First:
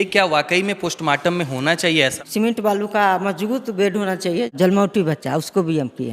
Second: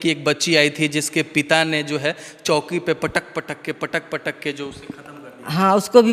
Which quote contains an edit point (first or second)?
first